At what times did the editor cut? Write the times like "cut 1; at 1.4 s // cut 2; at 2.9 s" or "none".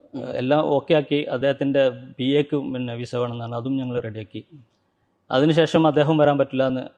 none